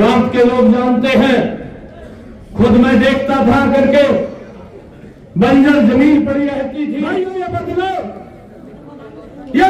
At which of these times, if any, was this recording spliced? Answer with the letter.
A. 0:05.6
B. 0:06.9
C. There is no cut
B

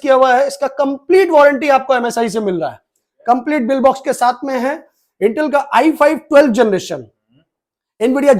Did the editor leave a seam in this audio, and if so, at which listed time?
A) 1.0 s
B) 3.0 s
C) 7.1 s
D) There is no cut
D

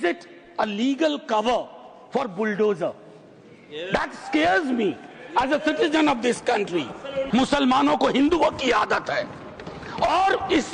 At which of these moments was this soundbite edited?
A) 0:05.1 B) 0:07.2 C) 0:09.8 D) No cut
B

